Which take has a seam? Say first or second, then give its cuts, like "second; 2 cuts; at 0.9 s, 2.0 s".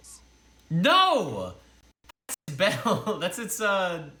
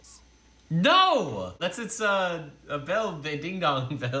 second; 1 cut; at 1.6 s